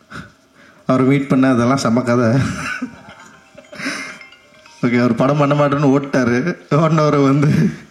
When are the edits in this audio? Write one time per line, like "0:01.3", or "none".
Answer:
none